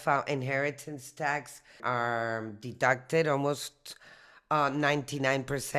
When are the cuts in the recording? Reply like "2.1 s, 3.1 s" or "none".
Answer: 1.7 s